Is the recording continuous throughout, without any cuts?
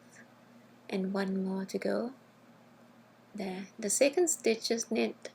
yes; 0 cuts

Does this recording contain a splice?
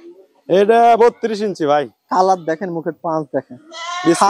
no; 0 cuts

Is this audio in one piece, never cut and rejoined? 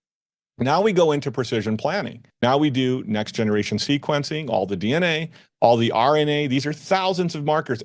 no; 1 cut; at 2.2 s

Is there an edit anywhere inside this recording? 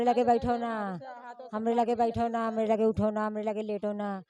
no; 0 cuts

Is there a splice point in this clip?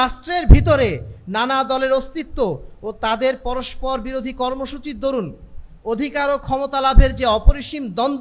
no; 0 cuts

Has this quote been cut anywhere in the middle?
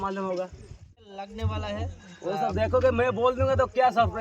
yes; 1 cut; at 1.0 s

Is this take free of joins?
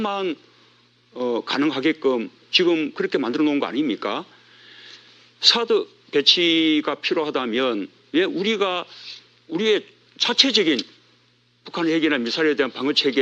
yes; 0 cuts

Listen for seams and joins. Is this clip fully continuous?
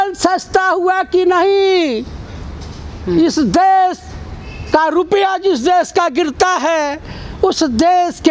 yes; 0 cuts

